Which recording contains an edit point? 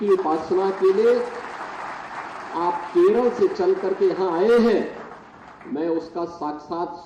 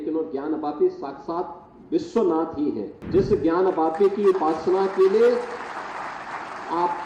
second; 1 cut; at 2.9 s

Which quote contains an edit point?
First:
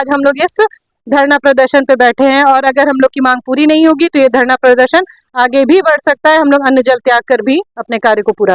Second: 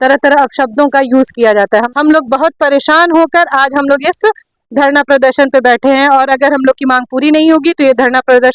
second; 1 cut; at 1.9 s

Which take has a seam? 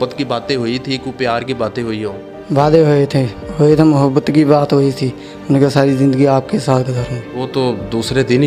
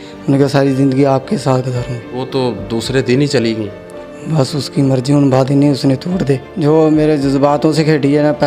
second; 1 cut; at 6.5 s

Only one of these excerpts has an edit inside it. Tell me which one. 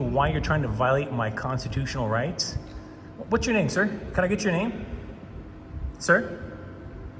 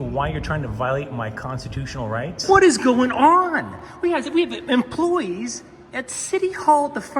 second; 1 cut; at 2.4 s

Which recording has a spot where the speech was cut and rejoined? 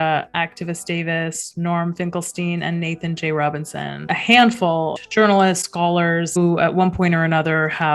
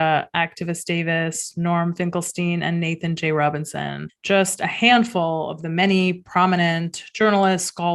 first; 3 cuts; at 4.1 s, 5.0 s, 6.4 s

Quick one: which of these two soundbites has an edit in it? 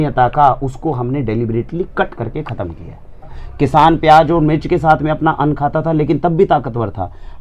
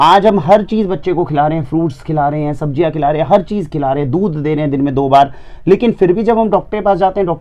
first; 1 cut; at 3.4 s

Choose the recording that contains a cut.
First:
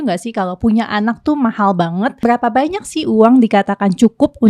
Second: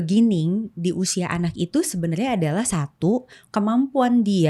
first; 1 cut; at 2.2 s

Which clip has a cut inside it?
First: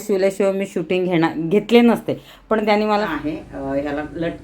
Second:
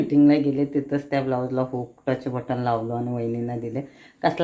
first; 1 cut; at 3.1 s

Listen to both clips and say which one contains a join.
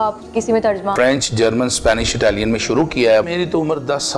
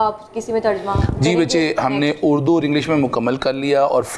first; 2 cuts; at 0.9 s, 3.3 s

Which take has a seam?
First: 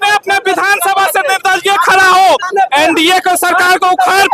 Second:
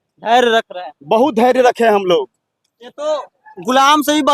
first; 1 cut; at 2.5 s

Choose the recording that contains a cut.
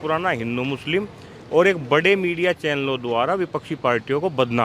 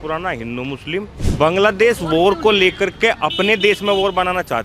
second; 1 cut; at 1.2 s

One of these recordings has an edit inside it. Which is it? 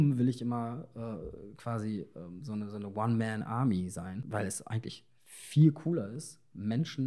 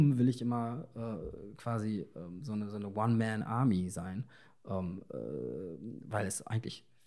first; 1 cut; at 4.3 s

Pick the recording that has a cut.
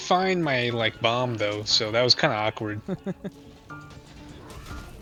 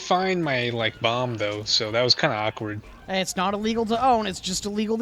second; 1 cut; at 2.9 s

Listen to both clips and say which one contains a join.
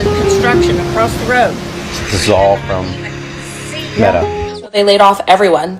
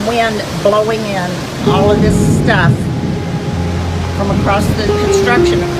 first; 1 cut; at 4.5 s

